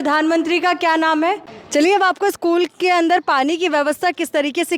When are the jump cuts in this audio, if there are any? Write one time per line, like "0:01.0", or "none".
0:01.5